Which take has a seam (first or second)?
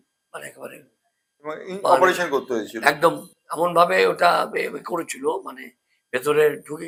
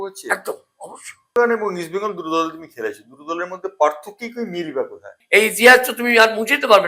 second